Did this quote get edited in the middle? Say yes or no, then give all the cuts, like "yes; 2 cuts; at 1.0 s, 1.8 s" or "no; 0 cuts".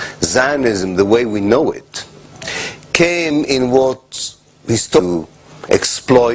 no; 0 cuts